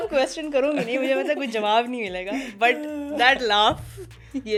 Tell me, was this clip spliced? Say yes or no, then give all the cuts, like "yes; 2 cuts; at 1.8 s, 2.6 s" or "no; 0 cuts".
no; 0 cuts